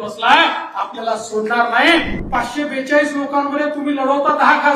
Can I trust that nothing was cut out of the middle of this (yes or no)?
no